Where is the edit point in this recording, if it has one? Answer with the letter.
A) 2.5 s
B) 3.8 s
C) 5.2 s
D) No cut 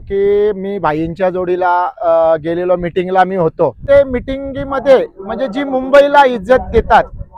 B